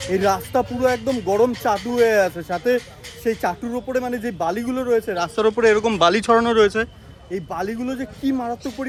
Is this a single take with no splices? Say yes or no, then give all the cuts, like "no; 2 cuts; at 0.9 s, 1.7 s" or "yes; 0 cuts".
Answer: yes; 0 cuts